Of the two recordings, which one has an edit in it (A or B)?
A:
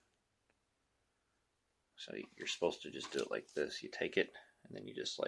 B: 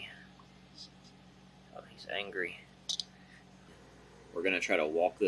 B